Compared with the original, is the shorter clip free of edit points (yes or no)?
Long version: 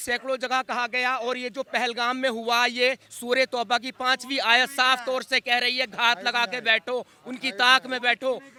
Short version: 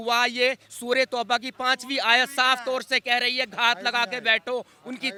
yes